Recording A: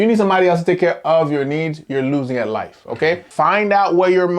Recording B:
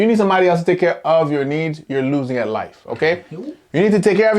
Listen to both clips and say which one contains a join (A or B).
A